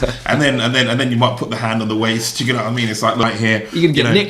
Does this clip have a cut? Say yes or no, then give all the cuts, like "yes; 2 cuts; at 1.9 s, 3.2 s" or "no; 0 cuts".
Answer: yes; 1 cut; at 3.2 s